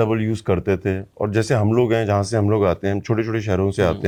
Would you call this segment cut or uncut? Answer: uncut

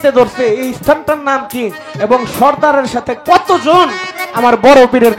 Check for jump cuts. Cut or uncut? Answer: uncut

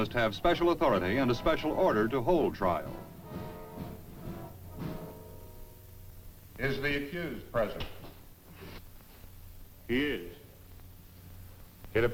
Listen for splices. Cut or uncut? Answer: cut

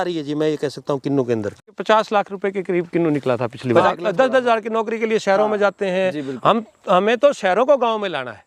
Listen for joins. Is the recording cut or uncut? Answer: cut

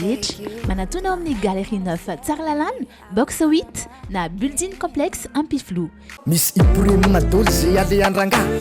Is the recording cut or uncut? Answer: cut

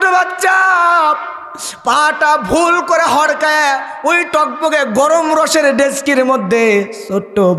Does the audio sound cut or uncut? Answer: uncut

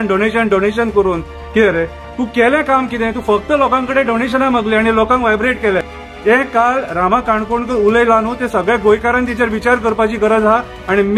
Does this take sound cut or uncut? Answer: cut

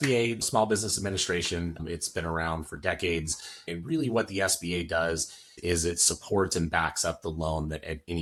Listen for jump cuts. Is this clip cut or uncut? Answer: uncut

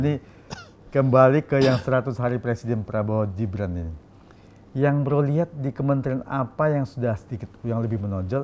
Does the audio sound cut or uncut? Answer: uncut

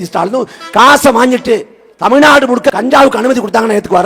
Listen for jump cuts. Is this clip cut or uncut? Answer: cut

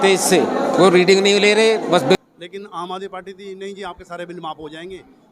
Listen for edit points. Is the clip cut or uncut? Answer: cut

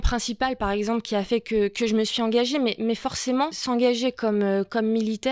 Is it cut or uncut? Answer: cut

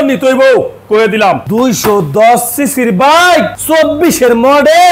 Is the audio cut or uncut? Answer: cut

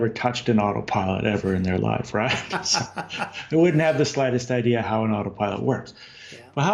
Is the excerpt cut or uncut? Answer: uncut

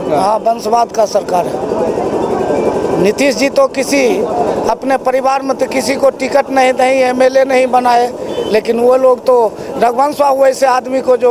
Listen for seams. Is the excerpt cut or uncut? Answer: uncut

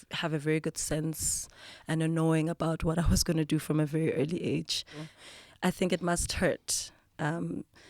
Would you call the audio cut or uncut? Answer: cut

